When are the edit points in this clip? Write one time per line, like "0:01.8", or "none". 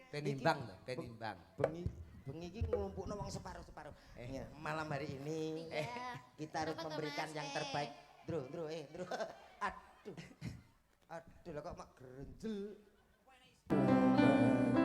0:13.7